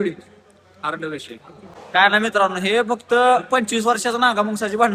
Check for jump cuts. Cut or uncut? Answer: uncut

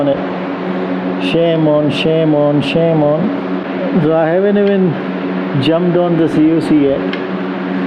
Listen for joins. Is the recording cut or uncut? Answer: uncut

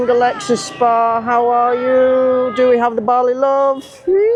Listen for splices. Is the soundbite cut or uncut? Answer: uncut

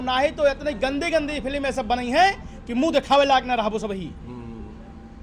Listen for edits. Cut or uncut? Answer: uncut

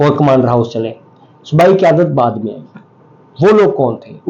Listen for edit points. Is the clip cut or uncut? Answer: uncut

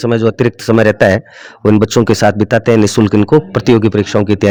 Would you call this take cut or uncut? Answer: uncut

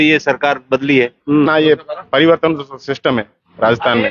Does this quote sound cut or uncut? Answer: cut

